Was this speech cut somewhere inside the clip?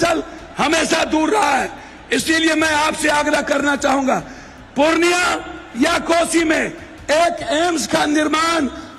no; 0 cuts

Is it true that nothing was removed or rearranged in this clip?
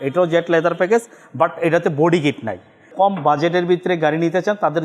no; 1 cut; at 2.9 s

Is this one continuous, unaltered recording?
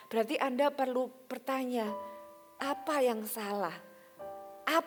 yes; 0 cuts

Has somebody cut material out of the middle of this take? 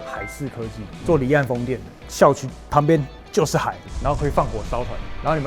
yes; 1 cut; at 3.8 s

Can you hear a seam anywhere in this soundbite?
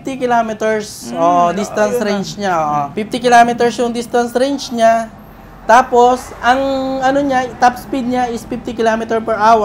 no; 0 cuts

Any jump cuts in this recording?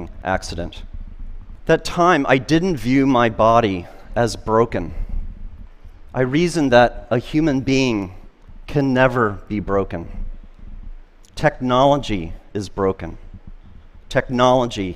no; 0 cuts

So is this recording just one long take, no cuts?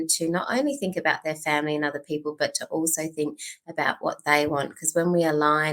yes; 0 cuts

